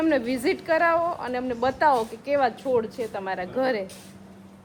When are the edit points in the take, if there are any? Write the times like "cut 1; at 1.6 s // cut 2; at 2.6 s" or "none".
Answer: none